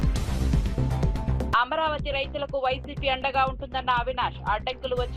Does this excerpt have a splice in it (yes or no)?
yes